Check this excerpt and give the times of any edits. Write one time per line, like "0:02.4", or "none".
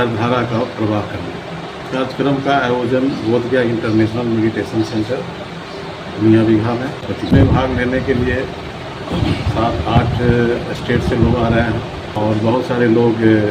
0:01.8
0:07.1
0:12.1